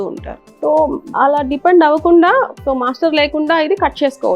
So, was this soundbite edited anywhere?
yes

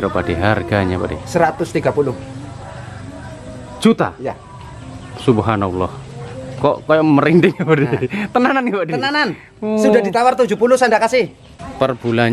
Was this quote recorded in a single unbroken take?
no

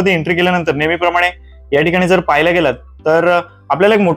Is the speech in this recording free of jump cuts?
yes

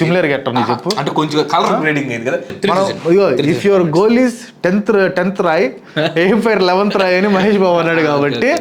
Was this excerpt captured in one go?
no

